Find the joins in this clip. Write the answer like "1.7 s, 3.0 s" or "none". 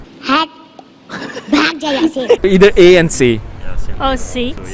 2.4 s